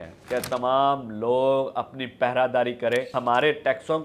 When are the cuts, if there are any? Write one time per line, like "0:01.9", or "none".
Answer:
0:03.1

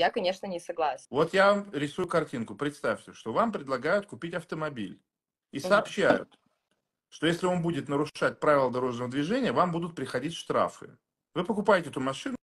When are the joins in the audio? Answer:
0:01.0
0:02.0

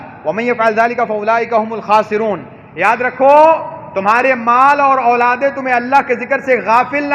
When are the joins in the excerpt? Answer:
none

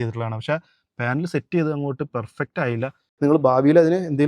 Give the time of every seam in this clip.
0:03.1

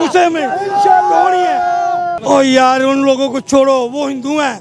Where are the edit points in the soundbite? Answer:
none

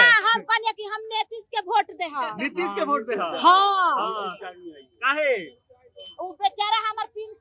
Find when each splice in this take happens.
none

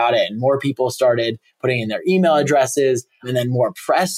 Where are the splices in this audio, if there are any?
none

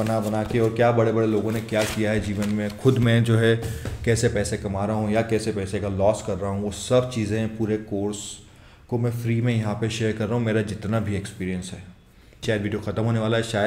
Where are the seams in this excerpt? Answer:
0:12.4

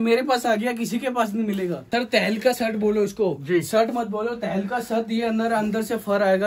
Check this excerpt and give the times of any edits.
0:01.8

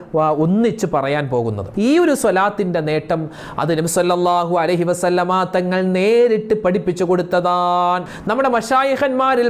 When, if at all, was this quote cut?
0:01.6

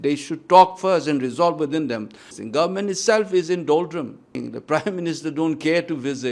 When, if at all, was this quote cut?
0:02.3
0:04.4

